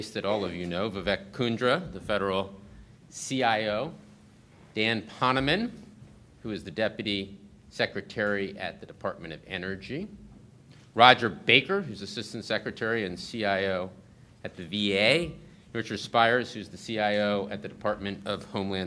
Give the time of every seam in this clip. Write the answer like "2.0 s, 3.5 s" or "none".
none